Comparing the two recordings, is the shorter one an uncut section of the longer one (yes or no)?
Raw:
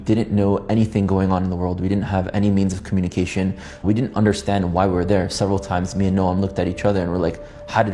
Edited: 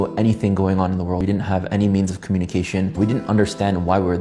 no